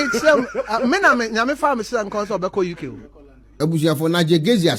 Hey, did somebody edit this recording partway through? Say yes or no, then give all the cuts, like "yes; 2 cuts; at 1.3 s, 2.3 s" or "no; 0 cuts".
no; 0 cuts